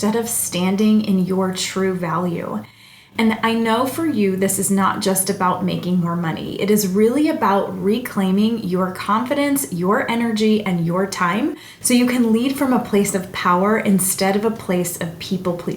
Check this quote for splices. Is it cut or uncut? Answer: uncut